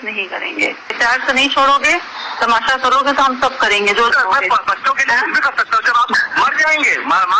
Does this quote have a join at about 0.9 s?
yes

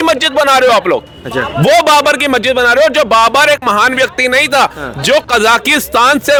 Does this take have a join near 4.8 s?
no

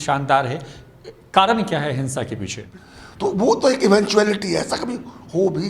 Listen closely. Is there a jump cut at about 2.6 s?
yes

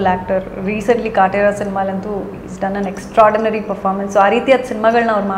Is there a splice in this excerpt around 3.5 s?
no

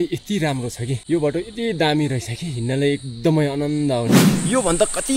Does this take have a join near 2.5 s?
no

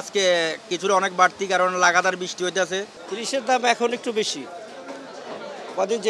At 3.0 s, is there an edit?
yes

